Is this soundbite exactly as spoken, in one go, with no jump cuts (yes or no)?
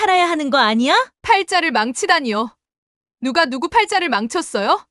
no